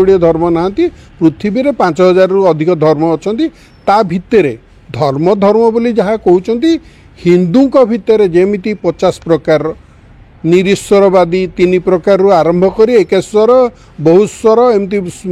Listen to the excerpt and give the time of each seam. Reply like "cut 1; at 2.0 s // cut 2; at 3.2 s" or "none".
none